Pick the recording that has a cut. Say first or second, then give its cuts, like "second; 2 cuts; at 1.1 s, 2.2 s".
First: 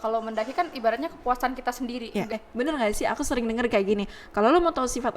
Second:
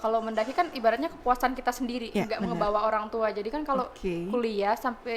first; 1 cut; at 2.3 s